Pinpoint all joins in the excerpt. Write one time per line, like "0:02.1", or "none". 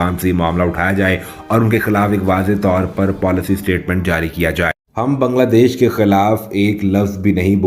0:04.9